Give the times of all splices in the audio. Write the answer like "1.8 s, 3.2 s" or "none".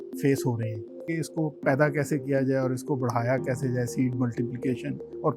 1.1 s